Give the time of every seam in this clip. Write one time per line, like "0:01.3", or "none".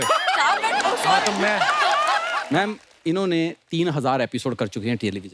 0:02.3